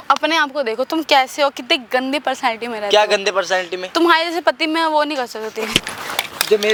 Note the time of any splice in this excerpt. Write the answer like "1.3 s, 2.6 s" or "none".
none